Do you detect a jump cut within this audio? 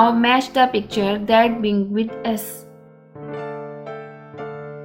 yes; 1 cut; at 2.4 s

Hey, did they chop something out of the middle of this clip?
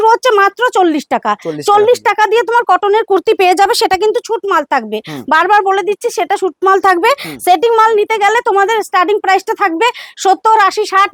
no; 0 cuts

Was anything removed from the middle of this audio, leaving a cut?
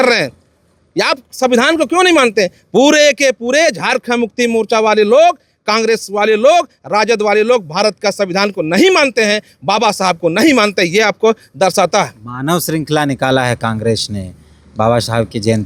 no; 0 cuts

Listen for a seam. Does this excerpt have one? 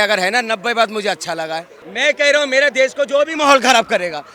yes; 1 cut; at 1.8 s

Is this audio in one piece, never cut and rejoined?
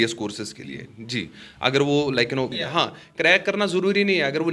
no; 1 cut; at 2.6 s

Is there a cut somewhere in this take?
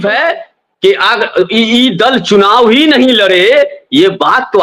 no; 0 cuts

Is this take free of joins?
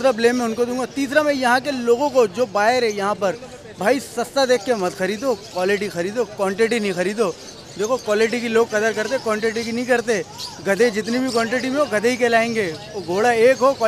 yes; 0 cuts

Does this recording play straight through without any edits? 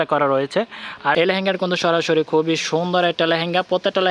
no; 1 cut; at 1.1 s

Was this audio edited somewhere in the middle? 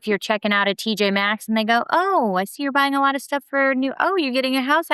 no; 0 cuts

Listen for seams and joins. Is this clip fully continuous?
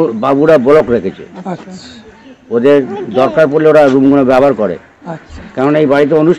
yes; 0 cuts

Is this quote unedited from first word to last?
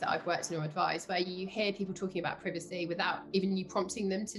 yes; 0 cuts

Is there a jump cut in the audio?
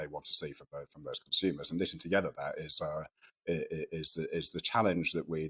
no; 0 cuts

